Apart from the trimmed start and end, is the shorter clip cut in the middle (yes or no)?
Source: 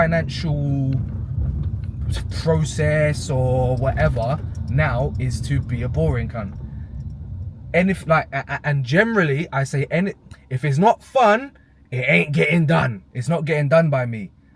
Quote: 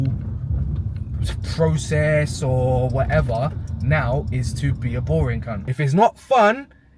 yes